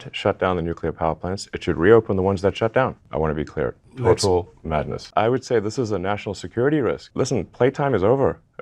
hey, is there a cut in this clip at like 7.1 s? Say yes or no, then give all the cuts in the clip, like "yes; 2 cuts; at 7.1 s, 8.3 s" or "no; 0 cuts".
yes; 3 cuts; at 3.0 s, 5.0 s, 7.1 s